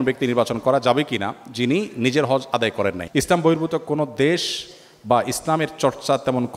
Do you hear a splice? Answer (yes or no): yes